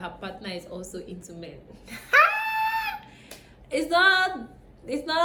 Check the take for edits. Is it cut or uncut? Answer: uncut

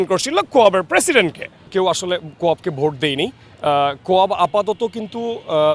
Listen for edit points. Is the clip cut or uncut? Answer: cut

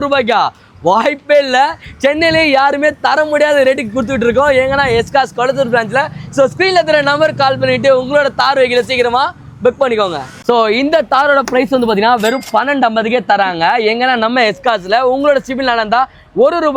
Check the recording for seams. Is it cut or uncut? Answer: uncut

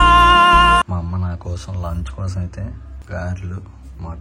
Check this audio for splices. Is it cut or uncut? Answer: cut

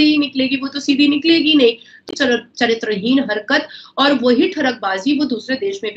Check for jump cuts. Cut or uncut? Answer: cut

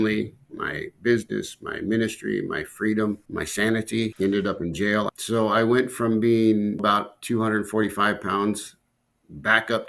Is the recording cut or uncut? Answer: cut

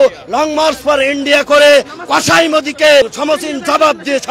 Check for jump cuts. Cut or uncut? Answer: cut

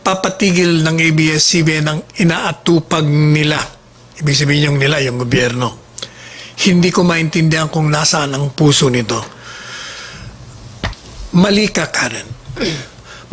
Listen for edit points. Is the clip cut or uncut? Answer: cut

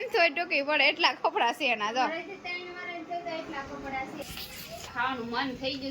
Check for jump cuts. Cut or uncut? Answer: cut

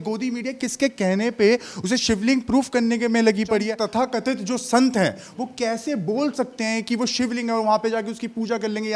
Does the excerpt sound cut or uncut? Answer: cut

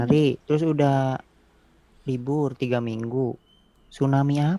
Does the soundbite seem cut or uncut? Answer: uncut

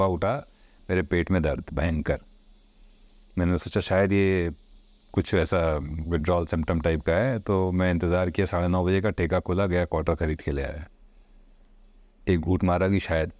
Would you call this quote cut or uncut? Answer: uncut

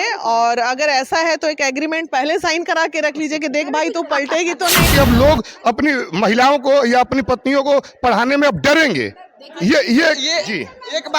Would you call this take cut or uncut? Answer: cut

